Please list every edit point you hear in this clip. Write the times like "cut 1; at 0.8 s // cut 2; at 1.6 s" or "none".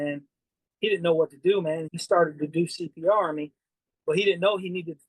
cut 1; at 1.9 s